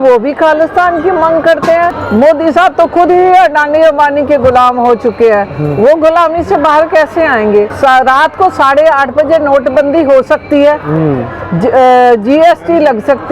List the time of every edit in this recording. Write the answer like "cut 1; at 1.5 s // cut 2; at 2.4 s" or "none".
cut 1; at 2.0 s // cut 2; at 7.7 s